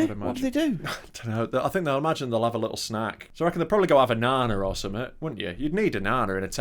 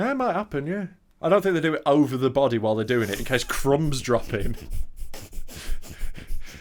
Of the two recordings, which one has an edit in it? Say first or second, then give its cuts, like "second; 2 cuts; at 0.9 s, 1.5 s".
first; 1 cut; at 3.2 s